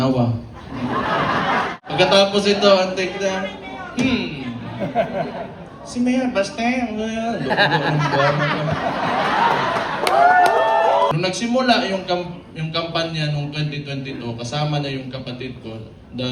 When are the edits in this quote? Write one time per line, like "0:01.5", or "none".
0:01.8
0:11.1